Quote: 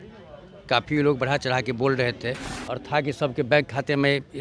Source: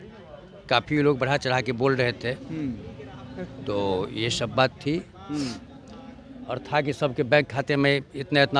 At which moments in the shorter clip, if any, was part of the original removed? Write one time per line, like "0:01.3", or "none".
0:02.5